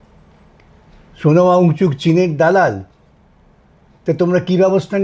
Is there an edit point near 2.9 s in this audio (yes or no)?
no